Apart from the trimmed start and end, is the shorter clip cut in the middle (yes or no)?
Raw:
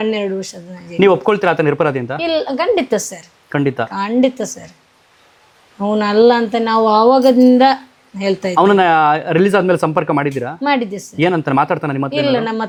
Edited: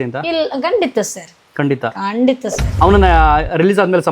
yes